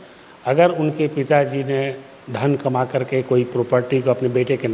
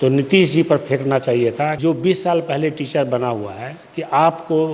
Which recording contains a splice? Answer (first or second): second